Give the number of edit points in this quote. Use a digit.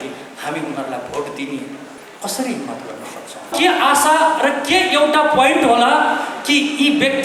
2